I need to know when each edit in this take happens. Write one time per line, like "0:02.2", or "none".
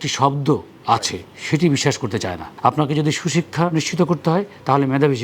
0:02.5